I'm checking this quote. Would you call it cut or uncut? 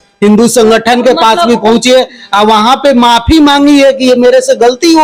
uncut